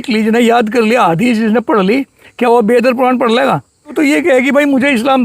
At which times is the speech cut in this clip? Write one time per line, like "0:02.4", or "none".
0:03.9